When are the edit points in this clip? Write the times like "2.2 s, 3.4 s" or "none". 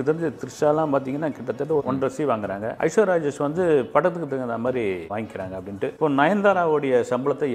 none